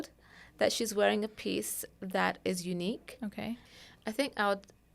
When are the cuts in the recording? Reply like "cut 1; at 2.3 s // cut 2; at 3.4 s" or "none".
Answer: cut 1; at 3.7 s